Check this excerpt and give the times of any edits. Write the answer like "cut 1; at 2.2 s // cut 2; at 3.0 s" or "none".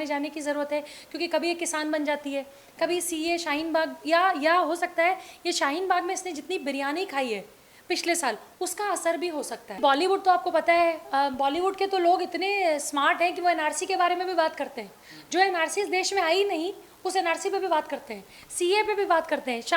cut 1; at 9.8 s